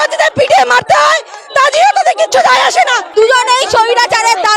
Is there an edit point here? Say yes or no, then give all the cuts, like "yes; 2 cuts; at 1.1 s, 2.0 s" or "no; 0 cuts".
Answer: yes; 1 cut; at 3.0 s